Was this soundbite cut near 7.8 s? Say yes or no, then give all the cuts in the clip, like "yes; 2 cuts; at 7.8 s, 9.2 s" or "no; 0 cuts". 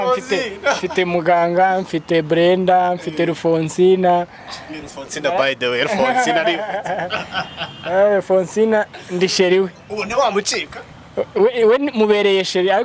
no; 0 cuts